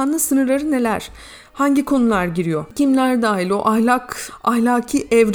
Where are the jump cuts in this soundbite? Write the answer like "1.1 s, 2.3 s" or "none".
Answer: 2.7 s